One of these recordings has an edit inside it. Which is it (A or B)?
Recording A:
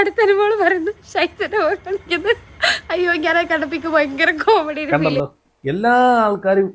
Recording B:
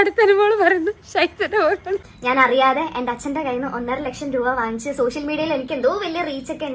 B